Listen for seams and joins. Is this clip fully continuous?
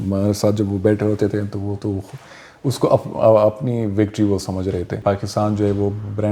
no; 1 cut; at 5.0 s

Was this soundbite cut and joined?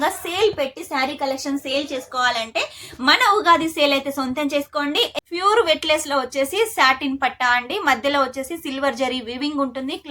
yes; 1 cut; at 5.1 s

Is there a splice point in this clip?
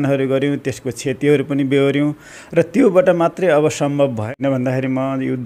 yes; 1 cut; at 4.3 s

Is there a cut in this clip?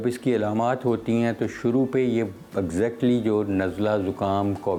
no; 0 cuts

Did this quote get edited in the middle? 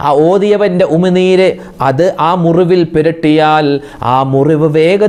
no; 0 cuts

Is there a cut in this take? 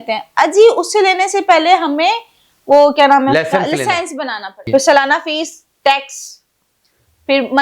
yes; 1 cut; at 4.6 s

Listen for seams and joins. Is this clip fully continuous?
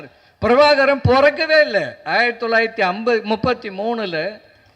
yes; 0 cuts

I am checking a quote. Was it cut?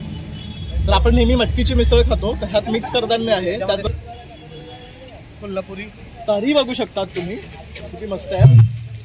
yes; 1 cut; at 3.8 s

